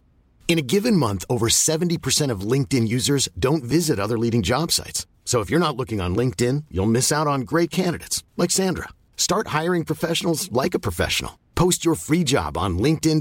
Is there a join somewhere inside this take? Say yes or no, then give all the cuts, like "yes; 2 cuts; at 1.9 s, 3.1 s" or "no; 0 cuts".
no; 0 cuts